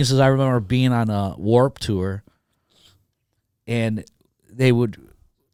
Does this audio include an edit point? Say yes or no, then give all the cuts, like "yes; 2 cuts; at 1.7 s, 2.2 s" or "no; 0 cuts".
no; 0 cuts